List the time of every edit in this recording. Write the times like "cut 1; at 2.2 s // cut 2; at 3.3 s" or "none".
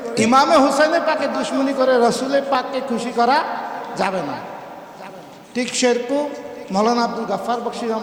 none